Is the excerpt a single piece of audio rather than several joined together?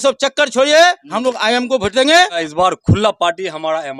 no; 1 cut; at 2.4 s

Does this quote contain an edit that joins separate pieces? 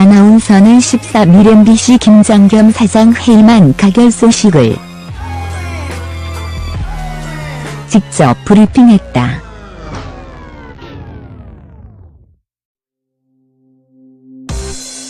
no; 0 cuts

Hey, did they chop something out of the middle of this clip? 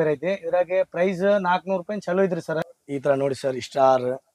yes; 1 cut; at 2.6 s

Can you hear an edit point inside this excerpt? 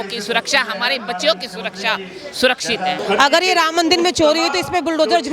yes; 1 cut; at 3.0 s

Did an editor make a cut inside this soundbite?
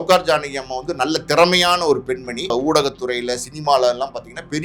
yes; 1 cut; at 2.5 s

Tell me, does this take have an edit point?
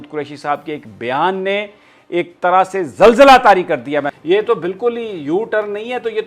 yes; 1 cut; at 4.1 s

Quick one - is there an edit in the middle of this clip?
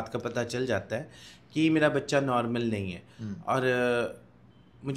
no; 0 cuts

